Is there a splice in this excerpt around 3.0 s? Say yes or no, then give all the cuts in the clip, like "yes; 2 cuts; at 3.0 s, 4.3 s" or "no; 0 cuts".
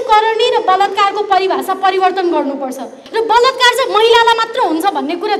yes; 1 cut; at 3.0 s